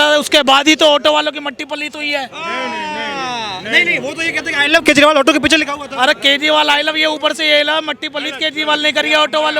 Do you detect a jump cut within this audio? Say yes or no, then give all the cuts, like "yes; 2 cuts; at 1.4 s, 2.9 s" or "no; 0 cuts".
no; 0 cuts